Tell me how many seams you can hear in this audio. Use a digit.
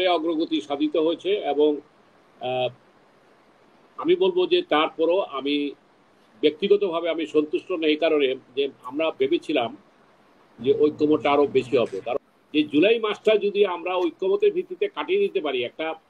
1